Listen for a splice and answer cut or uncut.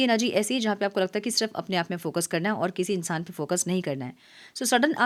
uncut